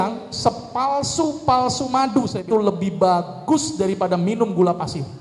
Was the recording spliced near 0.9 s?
no; 1 cut; at 2.4 s

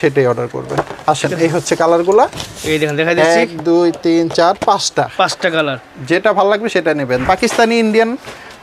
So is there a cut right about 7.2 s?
yes; 1 cut; at 7.2 s

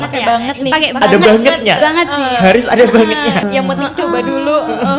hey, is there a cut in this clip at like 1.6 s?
no; 1 cut; at 3.5 s

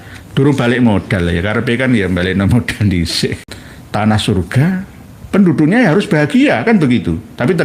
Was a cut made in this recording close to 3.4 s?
yes; 1 cut; at 3.4 s

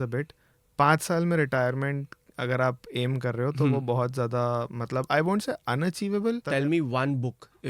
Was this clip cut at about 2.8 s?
no; 1 cut; at 6.4 s

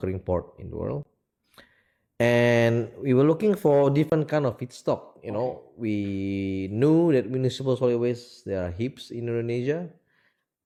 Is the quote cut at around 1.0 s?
no; 0 cuts

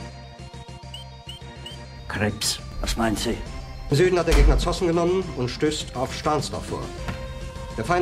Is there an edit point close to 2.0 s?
yes; 1 cut; at 2.0 s

